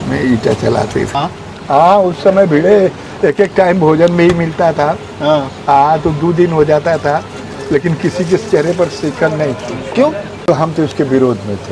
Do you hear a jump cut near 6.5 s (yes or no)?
no